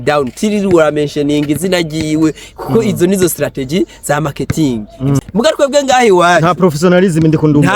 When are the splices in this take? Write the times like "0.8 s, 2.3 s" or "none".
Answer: 5.2 s

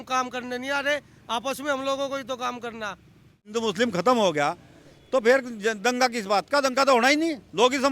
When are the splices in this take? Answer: 3.5 s

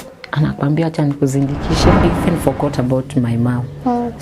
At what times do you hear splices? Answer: 2.0 s

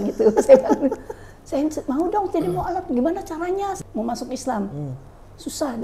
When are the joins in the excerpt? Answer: 3.7 s

